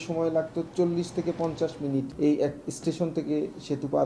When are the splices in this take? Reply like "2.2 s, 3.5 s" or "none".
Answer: 2.1 s